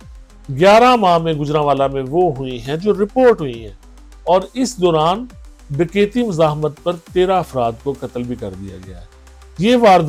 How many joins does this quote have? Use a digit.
0